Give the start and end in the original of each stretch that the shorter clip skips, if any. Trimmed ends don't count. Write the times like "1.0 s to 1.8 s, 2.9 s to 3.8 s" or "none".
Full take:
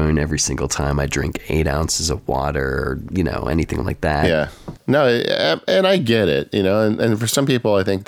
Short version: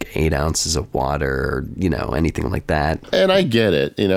4.3 s to 5.5 s